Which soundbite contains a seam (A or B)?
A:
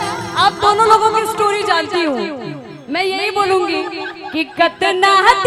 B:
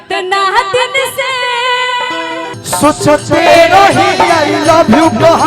B